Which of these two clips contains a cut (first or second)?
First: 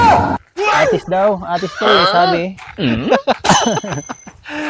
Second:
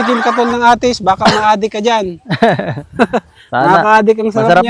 first